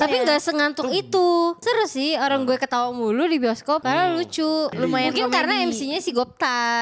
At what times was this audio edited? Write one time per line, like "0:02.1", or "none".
0:01.6
0:03.8
0:04.7